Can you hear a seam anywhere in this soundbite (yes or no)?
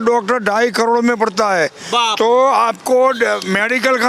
no